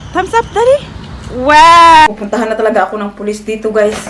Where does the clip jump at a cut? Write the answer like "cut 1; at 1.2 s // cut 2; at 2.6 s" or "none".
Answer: cut 1; at 2.1 s